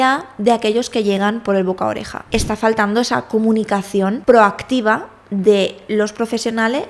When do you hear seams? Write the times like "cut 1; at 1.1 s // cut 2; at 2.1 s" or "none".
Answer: cut 1; at 2.1 s // cut 2; at 4.2 s